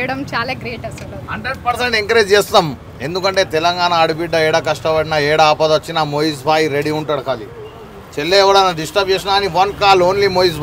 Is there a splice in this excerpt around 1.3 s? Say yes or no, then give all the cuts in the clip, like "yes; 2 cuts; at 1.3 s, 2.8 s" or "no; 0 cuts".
no; 0 cuts